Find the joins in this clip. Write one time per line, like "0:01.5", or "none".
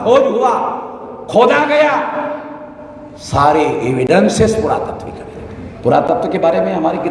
none